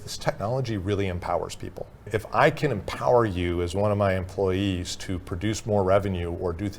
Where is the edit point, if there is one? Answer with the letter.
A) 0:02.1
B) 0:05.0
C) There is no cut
A